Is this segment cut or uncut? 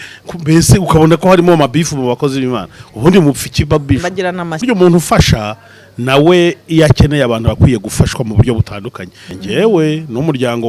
cut